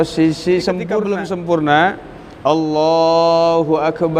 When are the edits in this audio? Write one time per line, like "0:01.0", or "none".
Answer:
0:00.9